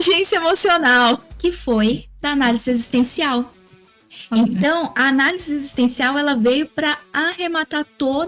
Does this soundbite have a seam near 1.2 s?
yes; 1 cut; at 1.2 s

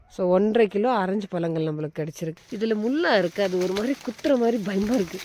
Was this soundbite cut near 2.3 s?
yes; 1 cut; at 2.3 s

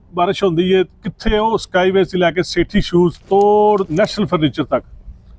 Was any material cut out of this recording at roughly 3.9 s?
yes; 2 cuts; at 3.2 s, 3.9 s

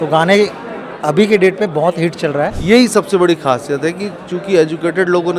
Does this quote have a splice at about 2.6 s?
yes; 1 cut; at 2.6 s

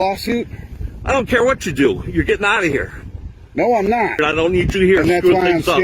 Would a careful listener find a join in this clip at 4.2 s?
yes; 1 cut; at 4.2 s

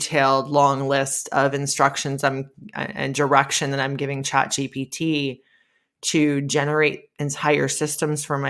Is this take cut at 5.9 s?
no; 0 cuts

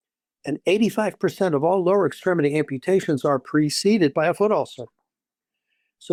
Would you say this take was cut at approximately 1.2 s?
no; 0 cuts

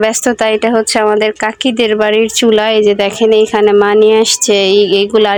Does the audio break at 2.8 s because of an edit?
no; 0 cuts

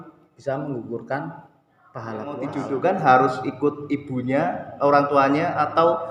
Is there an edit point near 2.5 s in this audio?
yes; 1 cut; at 2.5 s

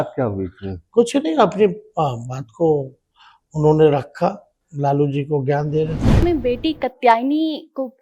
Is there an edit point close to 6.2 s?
yes; 1 cut; at 6.2 s

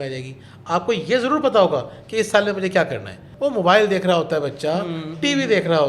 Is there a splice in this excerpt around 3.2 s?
yes; 1 cut; at 3.2 s

